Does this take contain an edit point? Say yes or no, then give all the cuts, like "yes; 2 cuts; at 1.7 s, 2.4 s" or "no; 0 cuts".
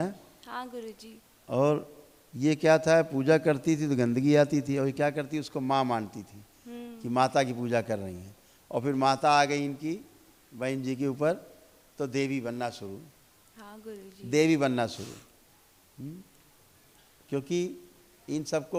no; 0 cuts